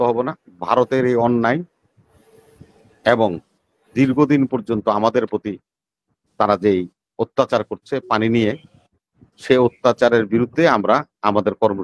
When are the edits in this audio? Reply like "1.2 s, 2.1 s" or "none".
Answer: none